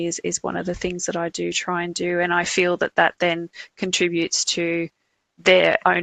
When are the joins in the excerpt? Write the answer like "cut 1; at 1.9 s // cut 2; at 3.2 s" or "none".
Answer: none